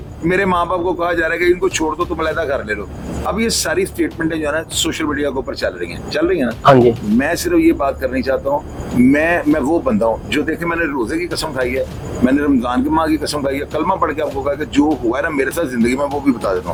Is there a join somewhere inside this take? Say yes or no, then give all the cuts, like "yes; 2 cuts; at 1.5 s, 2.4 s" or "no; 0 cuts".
no; 0 cuts